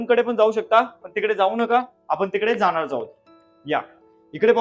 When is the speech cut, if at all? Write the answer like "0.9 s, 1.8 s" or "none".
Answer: none